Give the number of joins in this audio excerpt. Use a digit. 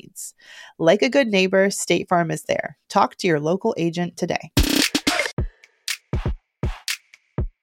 1